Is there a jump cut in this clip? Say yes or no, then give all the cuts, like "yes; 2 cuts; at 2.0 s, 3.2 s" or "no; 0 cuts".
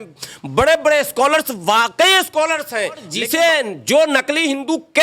yes; 1 cut; at 3.1 s